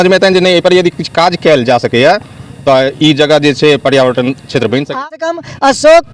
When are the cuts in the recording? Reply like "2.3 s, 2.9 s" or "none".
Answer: 5.1 s